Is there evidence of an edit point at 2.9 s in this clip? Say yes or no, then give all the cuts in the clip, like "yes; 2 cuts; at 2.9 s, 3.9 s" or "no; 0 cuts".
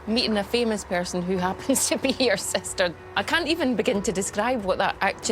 yes; 1 cut; at 2.9 s